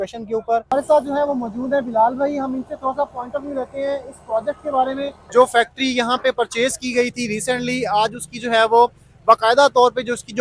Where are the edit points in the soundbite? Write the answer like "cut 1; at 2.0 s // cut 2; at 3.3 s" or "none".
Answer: cut 1; at 0.9 s // cut 2; at 5.2 s